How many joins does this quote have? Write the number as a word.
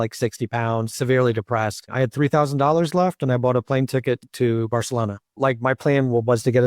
four